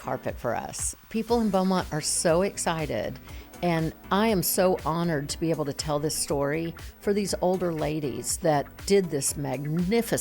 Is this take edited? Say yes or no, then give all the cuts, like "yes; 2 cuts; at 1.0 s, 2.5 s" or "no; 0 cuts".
no; 0 cuts